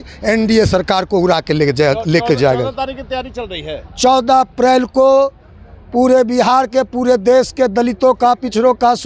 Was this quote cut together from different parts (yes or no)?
no